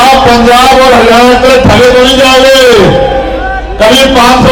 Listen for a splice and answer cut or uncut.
uncut